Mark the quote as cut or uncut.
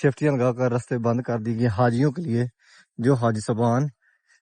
uncut